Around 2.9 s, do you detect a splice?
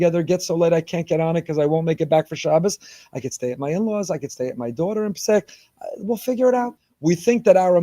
no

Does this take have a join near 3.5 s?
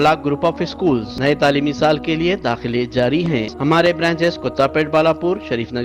yes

